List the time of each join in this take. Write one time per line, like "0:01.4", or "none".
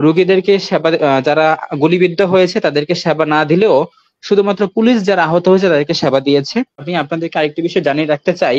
0:06.9